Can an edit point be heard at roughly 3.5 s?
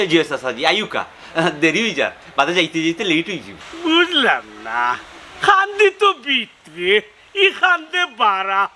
yes; 1 cut; at 3.5 s

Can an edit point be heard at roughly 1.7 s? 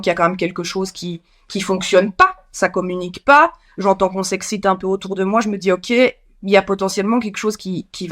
no; 0 cuts

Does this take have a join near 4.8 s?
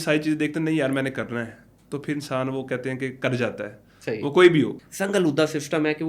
yes; 1 cut; at 4.8 s

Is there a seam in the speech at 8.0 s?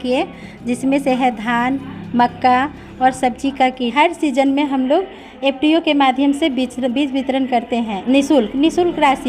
yes; 2 cuts; at 3.9 s, 8.0 s

